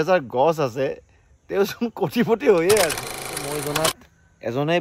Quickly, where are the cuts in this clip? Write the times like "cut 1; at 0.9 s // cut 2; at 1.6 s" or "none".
cut 1; at 3.2 s